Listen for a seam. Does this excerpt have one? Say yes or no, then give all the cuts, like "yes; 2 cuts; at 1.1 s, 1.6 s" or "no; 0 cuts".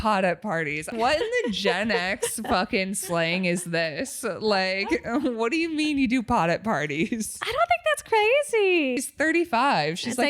yes; 2 cuts; at 0.9 s, 9.0 s